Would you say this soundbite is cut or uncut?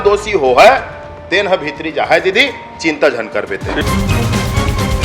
cut